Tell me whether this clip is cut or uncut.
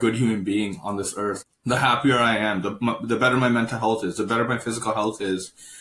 cut